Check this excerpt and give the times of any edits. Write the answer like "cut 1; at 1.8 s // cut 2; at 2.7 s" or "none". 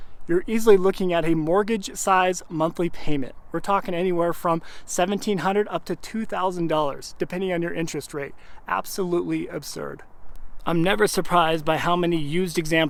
none

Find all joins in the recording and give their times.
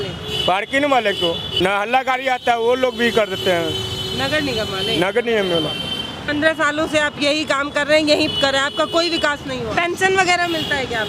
cut 1; at 1.2 s // cut 2; at 6.1 s // cut 3; at 9.7 s

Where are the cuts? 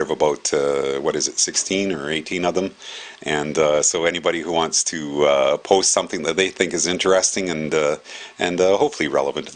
cut 1; at 1.0 s

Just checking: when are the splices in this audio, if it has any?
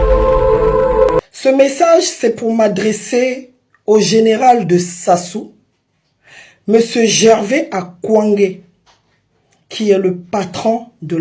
cut 1; at 1.3 s

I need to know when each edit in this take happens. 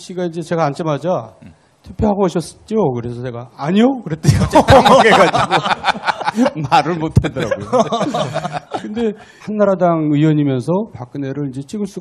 none

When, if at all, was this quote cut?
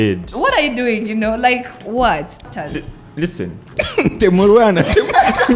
cut 1; at 2.3 s

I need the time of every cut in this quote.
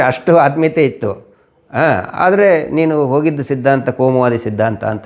none

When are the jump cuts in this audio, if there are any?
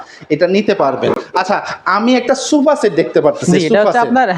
none

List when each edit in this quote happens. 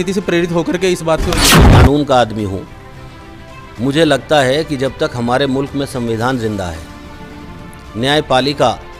cut 1; at 1.4 s

